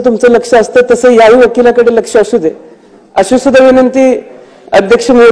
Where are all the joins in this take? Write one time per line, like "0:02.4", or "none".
none